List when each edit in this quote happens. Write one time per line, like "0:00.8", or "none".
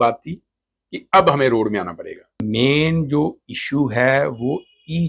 0:02.5